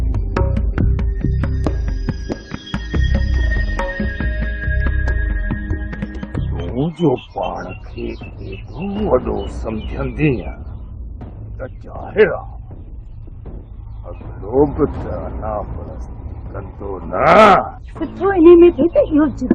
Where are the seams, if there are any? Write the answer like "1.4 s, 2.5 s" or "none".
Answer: none

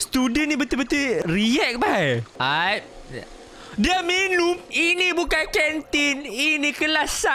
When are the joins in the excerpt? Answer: 1.2 s, 2.3 s, 4.6 s

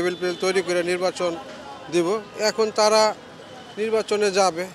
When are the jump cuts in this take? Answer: none

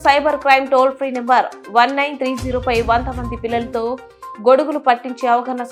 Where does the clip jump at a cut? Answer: none

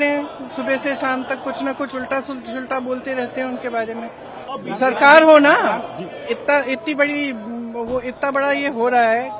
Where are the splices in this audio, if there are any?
4.5 s

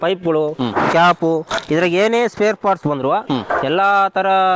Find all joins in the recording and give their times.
none

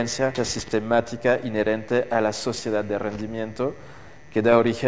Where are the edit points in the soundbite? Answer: none

